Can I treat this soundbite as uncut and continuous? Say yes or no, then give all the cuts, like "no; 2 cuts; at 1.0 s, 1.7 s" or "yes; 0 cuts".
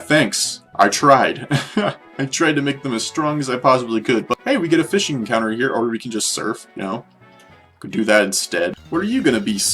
no; 2 cuts; at 4.3 s, 8.8 s